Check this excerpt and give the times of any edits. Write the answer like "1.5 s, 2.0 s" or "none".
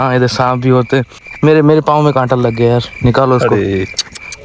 none